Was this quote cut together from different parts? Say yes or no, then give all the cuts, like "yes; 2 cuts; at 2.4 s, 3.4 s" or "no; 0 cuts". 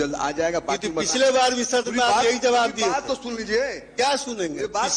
no; 0 cuts